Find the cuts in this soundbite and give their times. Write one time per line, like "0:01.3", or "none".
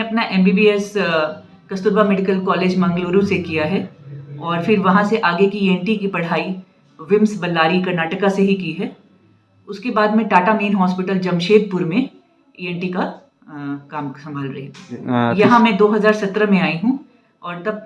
0:15.0